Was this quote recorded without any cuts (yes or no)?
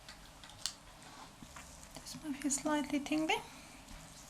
no